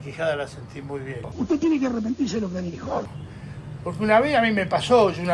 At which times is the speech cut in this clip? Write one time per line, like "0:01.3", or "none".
0:01.2